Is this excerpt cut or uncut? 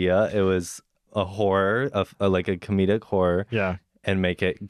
cut